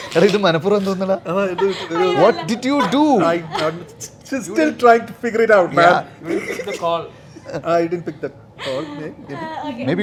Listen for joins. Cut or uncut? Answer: uncut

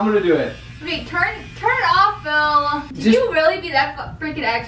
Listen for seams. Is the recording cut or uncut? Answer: cut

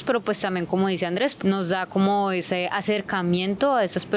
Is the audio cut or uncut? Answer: cut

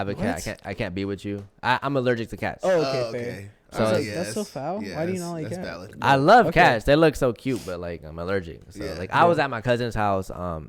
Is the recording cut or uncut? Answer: uncut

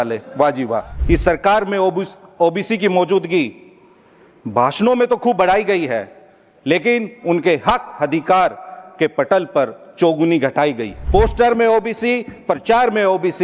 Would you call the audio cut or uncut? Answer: cut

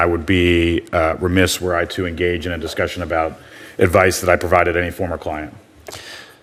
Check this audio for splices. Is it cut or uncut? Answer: uncut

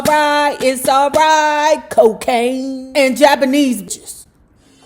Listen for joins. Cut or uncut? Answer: cut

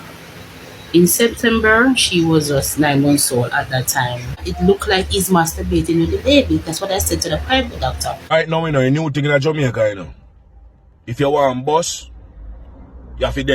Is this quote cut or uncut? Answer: cut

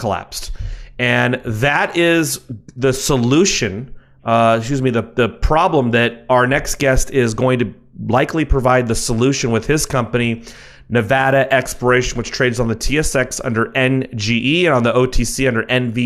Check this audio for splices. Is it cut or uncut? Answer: cut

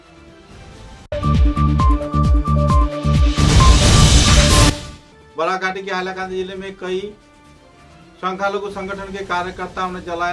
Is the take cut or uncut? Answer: uncut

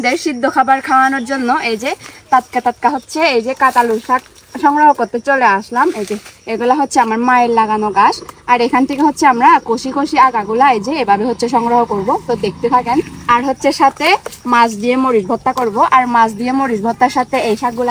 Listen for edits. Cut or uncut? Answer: uncut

